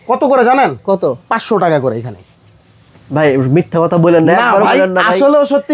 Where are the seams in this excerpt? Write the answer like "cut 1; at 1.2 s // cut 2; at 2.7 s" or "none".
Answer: none